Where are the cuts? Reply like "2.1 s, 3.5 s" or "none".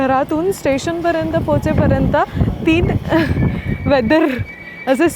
none